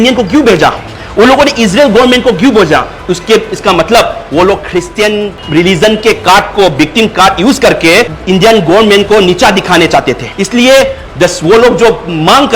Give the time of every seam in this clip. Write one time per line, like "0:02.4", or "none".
0:05.4
0:10.3
0:11.0